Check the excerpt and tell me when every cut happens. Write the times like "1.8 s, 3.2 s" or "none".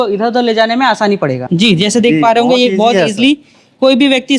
1.4 s

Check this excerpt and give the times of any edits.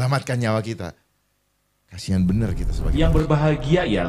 2.8 s

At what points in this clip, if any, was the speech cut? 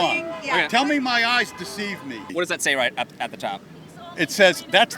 2.3 s

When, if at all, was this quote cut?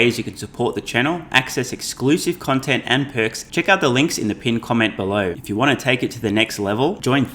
3.4 s, 5.4 s

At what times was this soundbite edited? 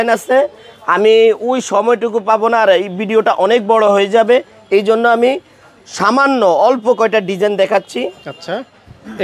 none

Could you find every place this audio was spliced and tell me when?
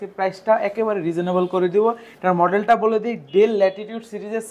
none

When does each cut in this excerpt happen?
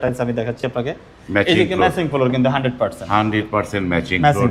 none

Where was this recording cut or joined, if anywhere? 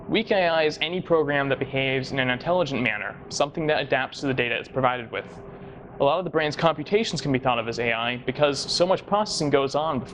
none

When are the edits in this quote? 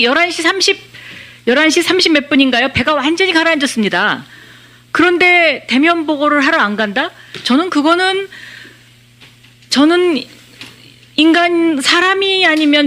none

